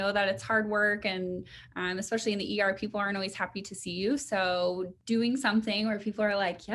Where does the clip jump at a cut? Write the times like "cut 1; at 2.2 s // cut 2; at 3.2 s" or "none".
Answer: cut 1; at 4.9 s